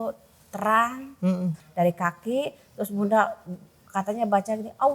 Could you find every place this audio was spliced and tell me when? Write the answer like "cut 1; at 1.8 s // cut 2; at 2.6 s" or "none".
cut 1; at 1.6 s